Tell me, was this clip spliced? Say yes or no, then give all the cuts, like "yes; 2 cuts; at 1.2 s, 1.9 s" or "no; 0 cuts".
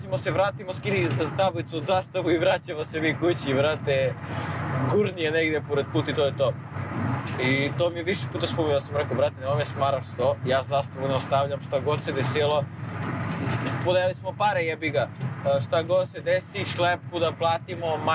no; 0 cuts